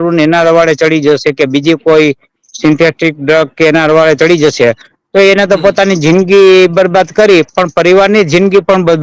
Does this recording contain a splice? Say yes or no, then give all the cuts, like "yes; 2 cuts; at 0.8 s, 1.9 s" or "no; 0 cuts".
no; 0 cuts